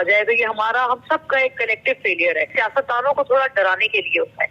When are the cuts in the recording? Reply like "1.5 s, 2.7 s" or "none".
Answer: 2.5 s